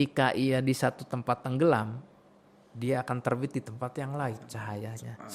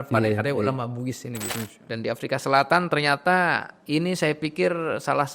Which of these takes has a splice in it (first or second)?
second